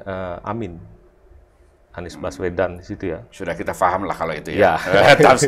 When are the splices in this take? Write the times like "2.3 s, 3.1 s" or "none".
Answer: none